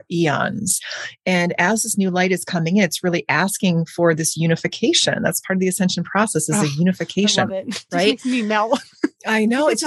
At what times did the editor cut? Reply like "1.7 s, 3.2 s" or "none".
7.7 s